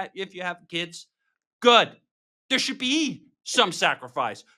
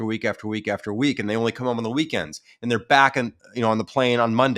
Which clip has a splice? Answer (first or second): second